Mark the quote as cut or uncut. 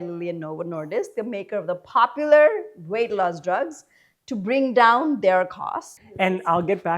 cut